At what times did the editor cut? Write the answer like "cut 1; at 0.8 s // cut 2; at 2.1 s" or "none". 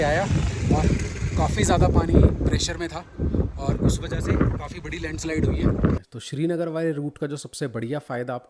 cut 1; at 6.2 s